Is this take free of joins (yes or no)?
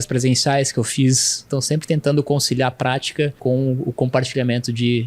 no